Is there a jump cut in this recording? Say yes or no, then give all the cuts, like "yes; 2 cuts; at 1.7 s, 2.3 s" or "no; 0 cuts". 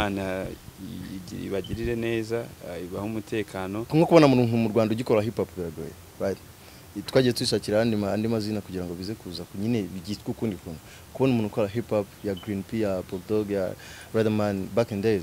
yes; 1 cut; at 3.8 s